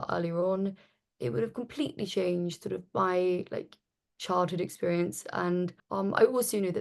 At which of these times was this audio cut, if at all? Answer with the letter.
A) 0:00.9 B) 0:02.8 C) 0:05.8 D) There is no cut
C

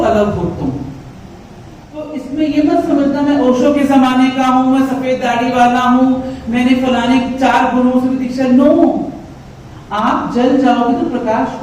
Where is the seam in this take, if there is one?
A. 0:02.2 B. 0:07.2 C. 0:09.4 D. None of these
A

